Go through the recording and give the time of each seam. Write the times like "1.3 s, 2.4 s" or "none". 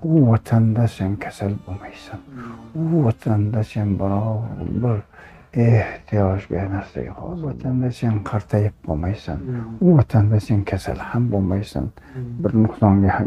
7.4 s